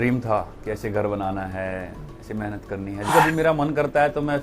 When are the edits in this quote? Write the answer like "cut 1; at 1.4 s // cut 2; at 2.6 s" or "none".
cut 1; at 3.1 s

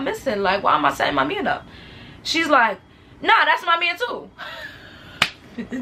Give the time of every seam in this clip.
none

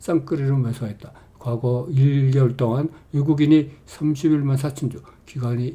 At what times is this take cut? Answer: none

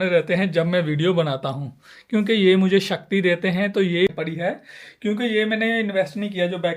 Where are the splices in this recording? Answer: cut 1; at 4.1 s

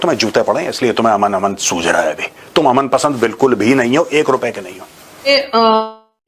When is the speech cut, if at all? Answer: cut 1; at 5.3 s

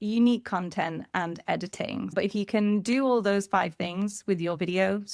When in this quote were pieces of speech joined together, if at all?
cut 1; at 2.1 s

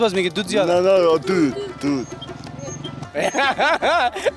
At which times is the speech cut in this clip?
cut 1; at 3.0 s

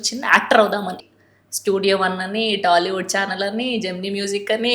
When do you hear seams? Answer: cut 1; at 1.1 s

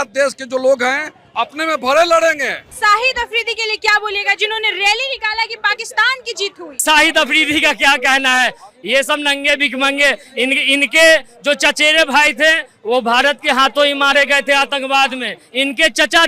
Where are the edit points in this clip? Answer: cut 1; at 2.7 s // cut 2; at 6.8 s

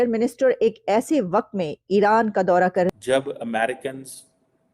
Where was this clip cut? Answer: cut 1; at 2.9 s

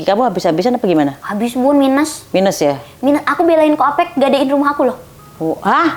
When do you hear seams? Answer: none

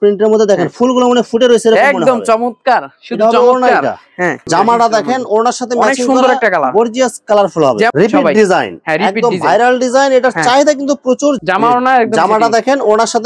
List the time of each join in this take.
cut 1; at 4.4 s // cut 2; at 7.9 s // cut 3; at 11.4 s

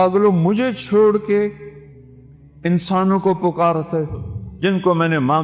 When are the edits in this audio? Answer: none

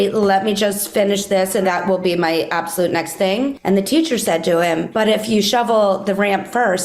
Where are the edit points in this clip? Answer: cut 1; at 1.6 s // cut 2; at 3.6 s // cut 3; at 4.9 s

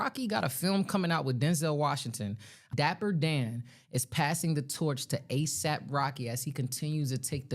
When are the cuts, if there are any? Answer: cut 1; at 2.7 s

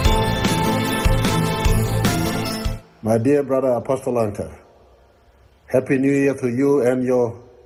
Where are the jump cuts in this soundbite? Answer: none

